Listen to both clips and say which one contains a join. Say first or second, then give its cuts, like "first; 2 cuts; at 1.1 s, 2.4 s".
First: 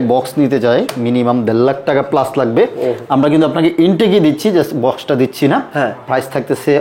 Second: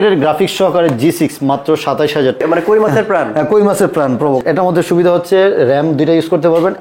second; 2 cuts; at 2.4 s, 4.4 s